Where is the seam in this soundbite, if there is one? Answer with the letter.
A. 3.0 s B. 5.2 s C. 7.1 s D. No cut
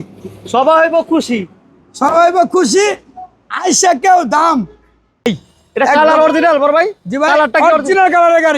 B